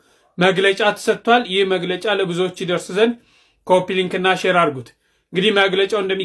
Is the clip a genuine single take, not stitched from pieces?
yes; 0 cuts

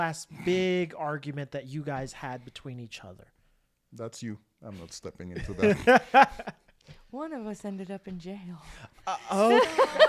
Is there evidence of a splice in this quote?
no; 0 cuts

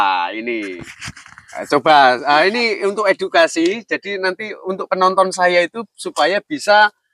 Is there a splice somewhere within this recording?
no; 0 cuts

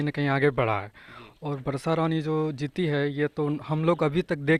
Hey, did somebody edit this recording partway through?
no; 0 cuts

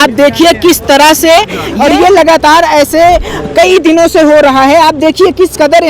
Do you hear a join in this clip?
yes; 1 cut; at 1.6 s

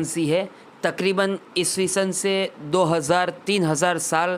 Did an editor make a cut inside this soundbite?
no; 0 cuts

